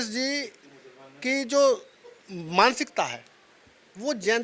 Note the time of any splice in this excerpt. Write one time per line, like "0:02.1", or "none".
none